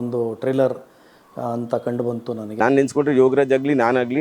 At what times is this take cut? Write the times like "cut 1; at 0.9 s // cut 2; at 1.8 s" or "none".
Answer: cut 1; at 2.6 s